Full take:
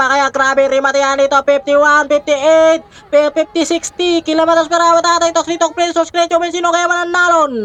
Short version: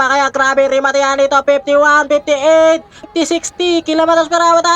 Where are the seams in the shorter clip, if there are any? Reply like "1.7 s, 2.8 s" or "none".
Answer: 3.1 s